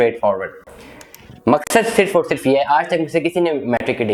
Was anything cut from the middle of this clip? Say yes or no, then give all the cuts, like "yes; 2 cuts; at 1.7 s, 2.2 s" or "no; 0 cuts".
no; 0 cuts